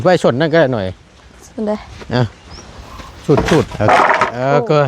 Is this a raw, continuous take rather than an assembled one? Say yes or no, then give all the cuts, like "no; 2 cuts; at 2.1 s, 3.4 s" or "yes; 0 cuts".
no; 1 cut; at 3.7 s